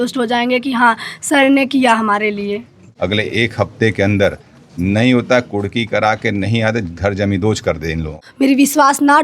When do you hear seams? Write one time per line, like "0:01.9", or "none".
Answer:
0:02.8
0:08.2

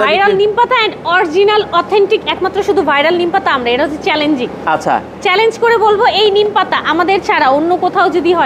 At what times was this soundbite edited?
none

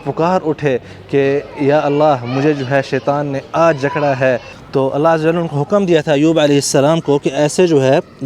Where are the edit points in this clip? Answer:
0:04.5

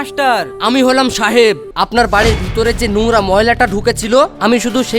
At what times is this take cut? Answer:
0:01.7

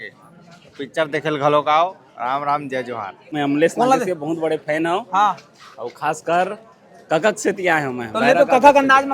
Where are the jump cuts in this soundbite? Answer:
0:03.3

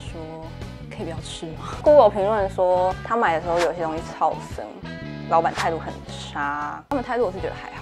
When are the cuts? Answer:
0:01.7
0:06.9

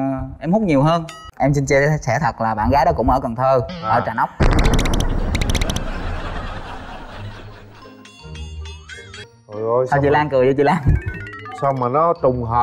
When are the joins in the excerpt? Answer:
0:01.2
0:09.3

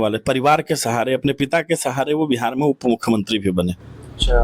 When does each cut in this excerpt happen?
none

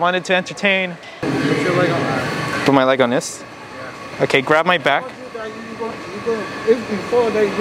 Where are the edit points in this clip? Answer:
0:01.2

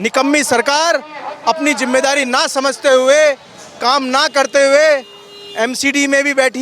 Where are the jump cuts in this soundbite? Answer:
none

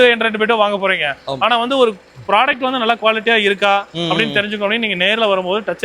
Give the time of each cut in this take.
none

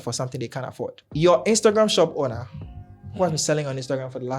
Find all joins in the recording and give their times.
0:01.0

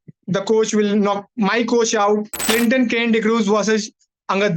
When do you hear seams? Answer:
0:02.4

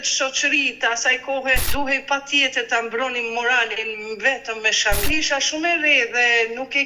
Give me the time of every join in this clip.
0:01.7
0:05.1

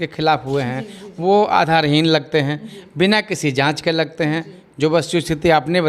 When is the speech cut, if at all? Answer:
none

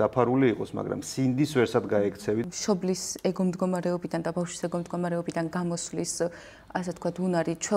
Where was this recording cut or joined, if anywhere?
0:02.4

